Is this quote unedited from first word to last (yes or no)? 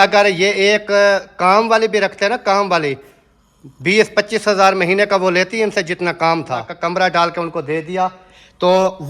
no